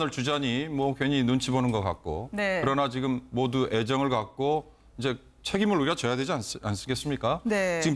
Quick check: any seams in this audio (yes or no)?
no